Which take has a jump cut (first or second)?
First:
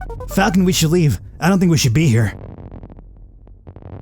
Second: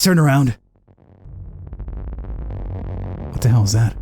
second